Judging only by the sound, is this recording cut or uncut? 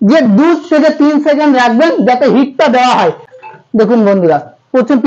cut